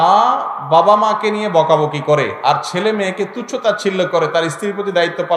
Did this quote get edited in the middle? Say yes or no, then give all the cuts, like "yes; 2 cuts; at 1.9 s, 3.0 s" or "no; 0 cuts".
no; 0 cuts